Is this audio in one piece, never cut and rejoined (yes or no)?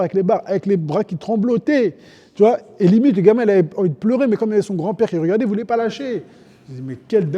yes